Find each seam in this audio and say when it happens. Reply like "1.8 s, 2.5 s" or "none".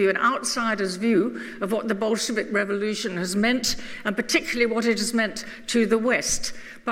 2.6 s